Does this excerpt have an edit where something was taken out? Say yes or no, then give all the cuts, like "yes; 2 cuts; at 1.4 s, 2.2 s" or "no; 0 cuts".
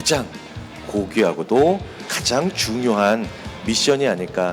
no; 0 cuts